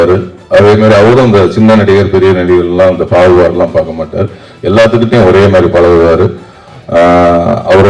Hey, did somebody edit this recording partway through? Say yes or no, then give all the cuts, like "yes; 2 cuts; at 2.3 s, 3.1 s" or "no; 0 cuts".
no; 0 cuts